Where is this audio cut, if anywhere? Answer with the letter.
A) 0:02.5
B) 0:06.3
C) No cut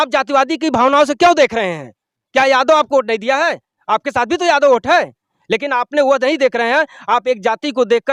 C